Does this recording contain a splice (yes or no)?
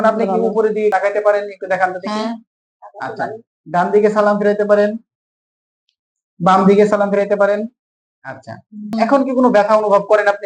yes